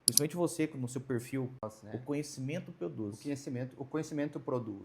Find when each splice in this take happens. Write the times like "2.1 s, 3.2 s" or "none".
1.7 s